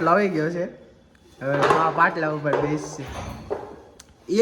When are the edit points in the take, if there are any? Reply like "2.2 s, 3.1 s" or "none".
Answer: none